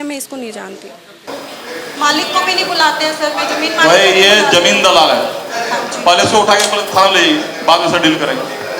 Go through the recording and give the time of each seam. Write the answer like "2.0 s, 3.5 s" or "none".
1.3 s